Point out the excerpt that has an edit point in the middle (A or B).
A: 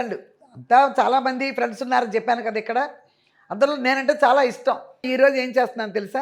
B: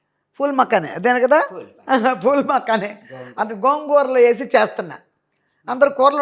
A